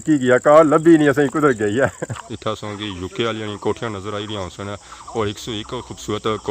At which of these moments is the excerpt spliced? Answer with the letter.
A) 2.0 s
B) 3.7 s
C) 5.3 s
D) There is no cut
A